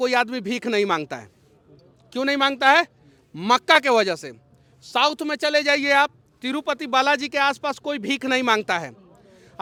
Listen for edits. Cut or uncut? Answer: uncut